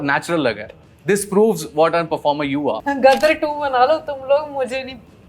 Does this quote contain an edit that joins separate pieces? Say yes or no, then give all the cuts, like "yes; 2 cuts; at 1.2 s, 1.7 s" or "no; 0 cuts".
yes; 1 cut; at 2.8 s